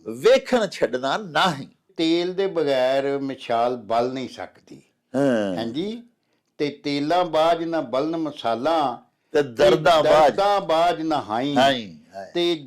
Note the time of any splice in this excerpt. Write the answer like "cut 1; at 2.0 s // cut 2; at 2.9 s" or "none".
cut 1; at 1.9 s

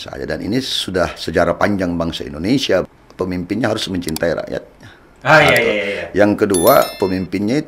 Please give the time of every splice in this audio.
cut 1; at 2.8 s

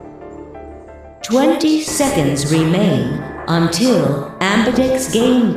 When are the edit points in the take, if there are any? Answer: cut 1; at 1.3 s

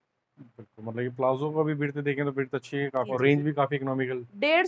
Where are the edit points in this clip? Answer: cut 1; at 3.1 s

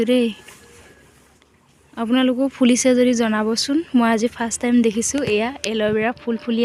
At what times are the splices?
none

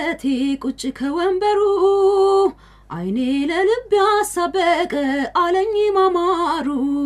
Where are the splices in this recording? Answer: none

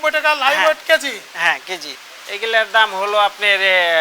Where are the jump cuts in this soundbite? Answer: cut 1; at 1.8 s

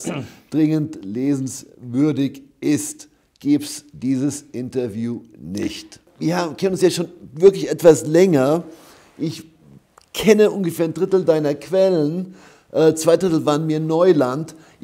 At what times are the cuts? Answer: cut 1; at 6.0 s

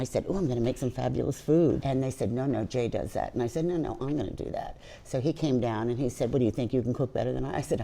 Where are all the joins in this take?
cut 1; at 1.8 s

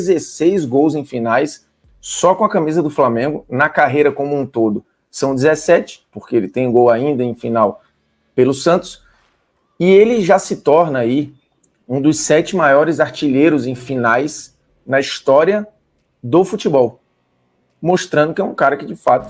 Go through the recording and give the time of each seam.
none

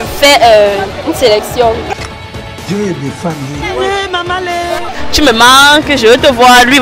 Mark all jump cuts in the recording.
cut 1; at 4.9 s

